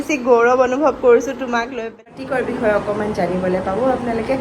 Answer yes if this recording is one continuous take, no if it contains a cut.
no